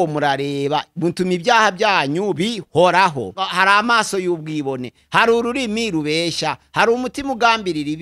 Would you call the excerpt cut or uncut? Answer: cut